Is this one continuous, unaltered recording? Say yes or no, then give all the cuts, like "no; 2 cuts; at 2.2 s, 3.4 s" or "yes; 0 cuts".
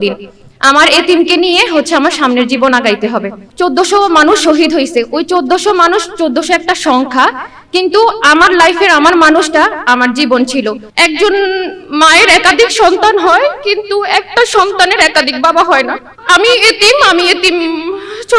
no; 2 cuts; at 3.4 s, 10.8 s